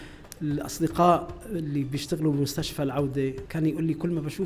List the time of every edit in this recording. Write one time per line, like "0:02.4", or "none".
0:03.4